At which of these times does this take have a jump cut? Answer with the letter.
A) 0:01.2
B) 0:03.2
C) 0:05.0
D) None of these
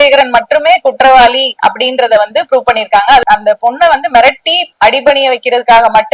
B